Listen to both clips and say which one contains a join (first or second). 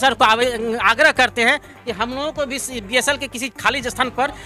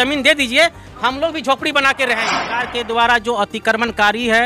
second